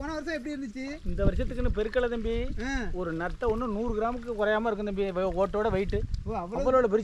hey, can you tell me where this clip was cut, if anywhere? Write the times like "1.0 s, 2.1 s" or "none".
none

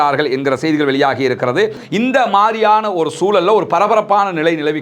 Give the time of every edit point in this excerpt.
1.8 s

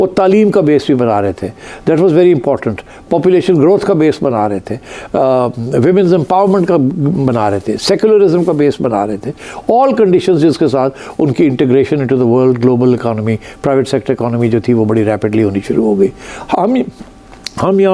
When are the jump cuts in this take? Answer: none

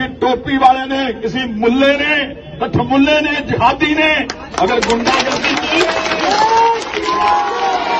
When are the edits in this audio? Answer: none

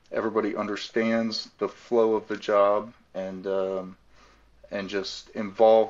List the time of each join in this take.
none

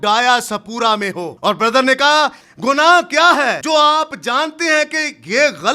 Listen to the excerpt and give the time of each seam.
1.3 s, 2.4 s, 3.6 s

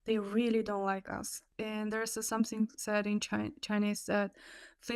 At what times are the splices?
1.4 s

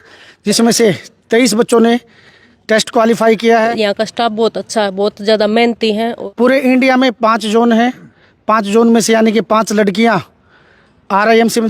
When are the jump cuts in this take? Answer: 3.7 s, 6.1 s

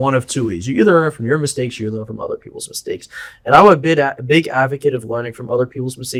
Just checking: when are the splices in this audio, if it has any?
none

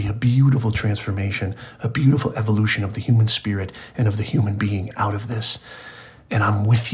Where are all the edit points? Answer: none

